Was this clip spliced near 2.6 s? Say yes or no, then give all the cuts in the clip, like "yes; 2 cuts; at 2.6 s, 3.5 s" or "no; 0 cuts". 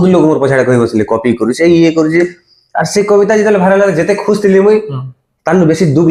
no; 0 cuts